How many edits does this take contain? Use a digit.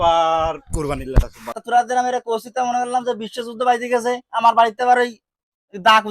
1